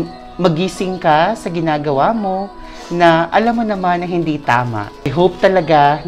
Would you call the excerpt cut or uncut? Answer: cut